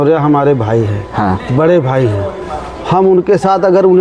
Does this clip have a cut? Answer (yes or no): no